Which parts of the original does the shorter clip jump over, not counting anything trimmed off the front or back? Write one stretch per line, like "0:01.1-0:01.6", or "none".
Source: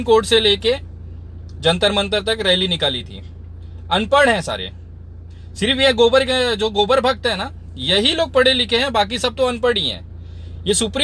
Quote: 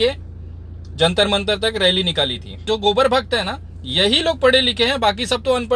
0:03.3-0:06.6

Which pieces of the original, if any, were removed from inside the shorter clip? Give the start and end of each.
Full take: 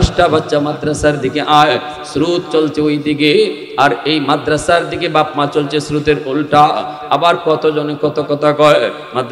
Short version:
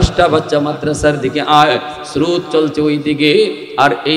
none

